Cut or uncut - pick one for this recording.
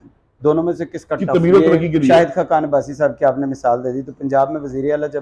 cut